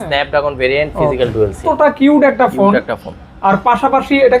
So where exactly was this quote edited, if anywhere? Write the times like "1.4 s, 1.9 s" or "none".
1.6 s